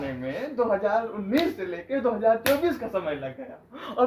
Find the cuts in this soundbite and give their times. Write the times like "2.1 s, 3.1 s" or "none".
none